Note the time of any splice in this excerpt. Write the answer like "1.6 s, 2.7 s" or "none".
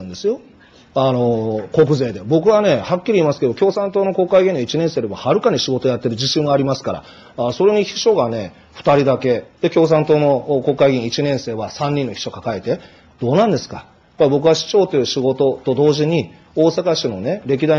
none

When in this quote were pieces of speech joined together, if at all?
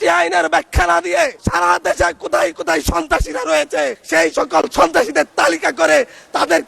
1.4 s, 4.0 s

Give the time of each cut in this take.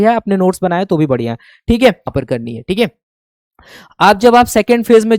2.1 s

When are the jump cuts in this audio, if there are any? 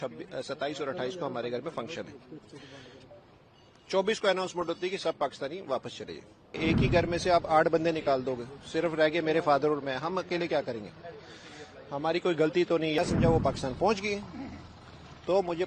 6.6 s, 13.0 s

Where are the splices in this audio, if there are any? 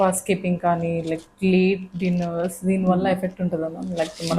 none

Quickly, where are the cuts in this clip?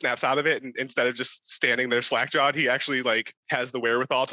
3.3 s

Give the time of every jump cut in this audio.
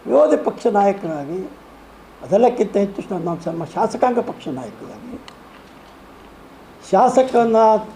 1.0 s

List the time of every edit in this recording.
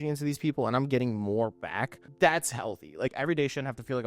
2.0 s, 3.1 s

